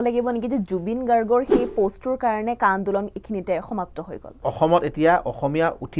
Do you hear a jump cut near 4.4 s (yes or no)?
yes